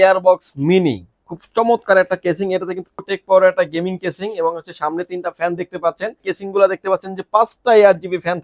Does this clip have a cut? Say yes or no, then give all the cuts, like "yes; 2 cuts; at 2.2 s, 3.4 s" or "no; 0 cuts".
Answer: yes; 2 cuts; at 3.0 s, 6.3 s